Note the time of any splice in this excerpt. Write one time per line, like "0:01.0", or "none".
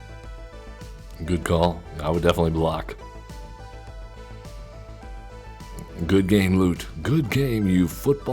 0:01.0